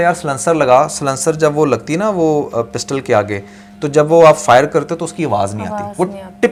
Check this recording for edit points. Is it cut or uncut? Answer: uncut